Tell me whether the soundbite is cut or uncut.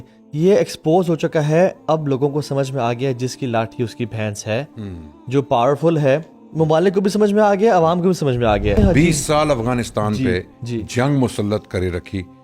cut